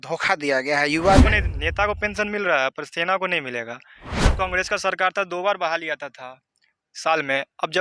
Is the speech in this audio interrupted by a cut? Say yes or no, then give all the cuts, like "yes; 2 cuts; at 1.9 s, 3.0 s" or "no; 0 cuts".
yes; 2 cuts; at 1.2 s, 4.2 s